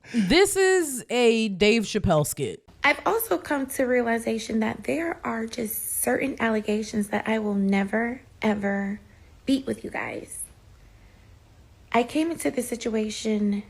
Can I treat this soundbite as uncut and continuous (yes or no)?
no